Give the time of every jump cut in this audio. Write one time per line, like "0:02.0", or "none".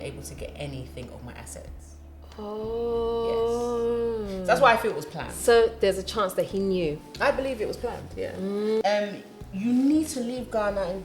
0:08.8